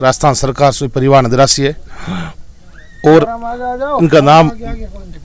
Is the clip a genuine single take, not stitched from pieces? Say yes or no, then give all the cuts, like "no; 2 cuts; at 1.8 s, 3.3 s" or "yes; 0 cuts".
yes; 0 cuts